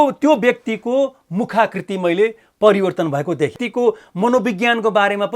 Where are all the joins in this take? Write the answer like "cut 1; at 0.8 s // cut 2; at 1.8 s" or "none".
cut 1; at 3.6 s